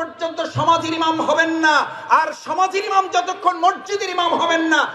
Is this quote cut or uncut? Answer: uncut